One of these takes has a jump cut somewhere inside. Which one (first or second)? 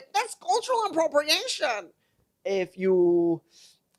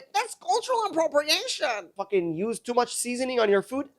second